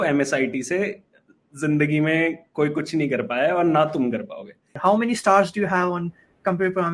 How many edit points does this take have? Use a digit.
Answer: 1